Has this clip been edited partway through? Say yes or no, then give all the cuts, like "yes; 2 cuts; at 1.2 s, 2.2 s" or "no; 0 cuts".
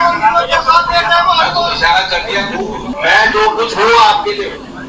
yes; 1 cut; at 2.9 s